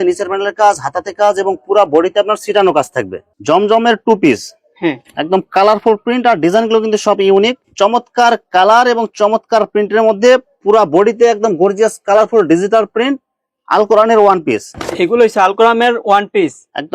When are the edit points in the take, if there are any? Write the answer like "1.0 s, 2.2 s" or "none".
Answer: 3.3 s, 7.6 s, 14.7 s